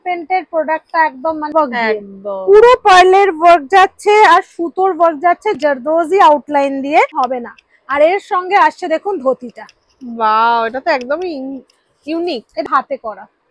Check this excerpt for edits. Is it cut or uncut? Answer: cut